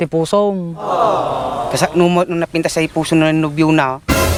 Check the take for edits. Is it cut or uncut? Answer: uncut